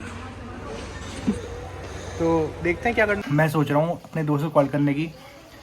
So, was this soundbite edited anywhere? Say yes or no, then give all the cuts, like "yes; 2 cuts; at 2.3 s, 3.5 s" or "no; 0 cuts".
yes; 1 cut; at 3.2 s